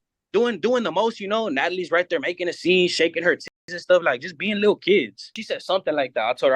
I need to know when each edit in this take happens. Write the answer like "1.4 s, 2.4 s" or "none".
5.4 s